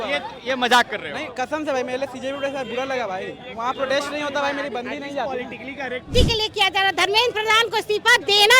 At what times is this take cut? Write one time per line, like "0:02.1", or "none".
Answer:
0:06.1